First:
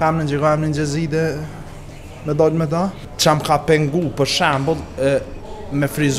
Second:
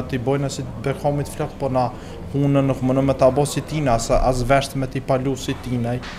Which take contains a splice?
first; 1 cut; at 3.1 s

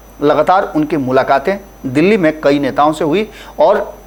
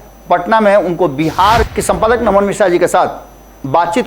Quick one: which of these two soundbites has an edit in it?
second; 1 cut; at 1.6 s

